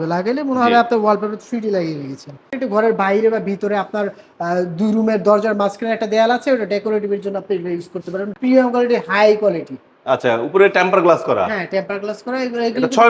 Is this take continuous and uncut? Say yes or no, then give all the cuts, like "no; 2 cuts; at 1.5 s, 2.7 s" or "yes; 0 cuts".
no; 2 cuts; at 2.5 s, 8.3 s